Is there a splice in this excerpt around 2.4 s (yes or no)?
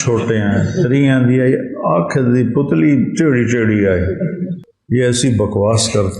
no